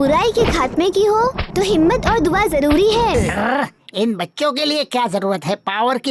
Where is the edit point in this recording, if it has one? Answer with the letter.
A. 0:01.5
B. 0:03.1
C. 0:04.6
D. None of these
B